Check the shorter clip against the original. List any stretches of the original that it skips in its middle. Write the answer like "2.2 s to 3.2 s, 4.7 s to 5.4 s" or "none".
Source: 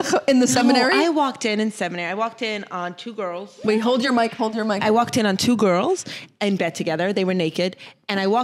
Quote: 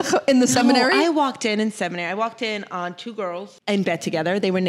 3.4 s to 6.2 s